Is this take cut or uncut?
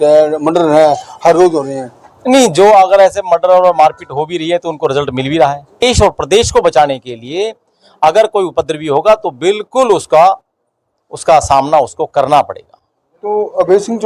cut